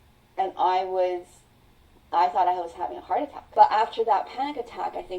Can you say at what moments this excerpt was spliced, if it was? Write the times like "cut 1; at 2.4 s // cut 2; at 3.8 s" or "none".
cut 1; at 3.4 s